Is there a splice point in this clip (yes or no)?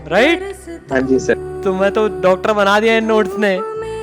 yes